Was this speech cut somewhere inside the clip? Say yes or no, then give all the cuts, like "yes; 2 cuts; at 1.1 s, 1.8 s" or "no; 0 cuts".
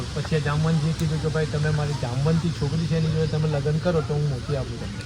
no; 0 cuts